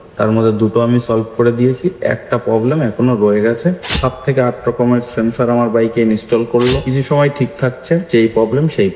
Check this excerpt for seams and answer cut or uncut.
cut